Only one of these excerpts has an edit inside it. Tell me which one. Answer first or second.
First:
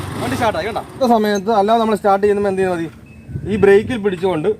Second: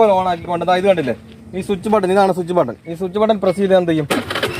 first